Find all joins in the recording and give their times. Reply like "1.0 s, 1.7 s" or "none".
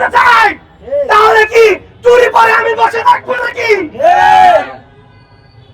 none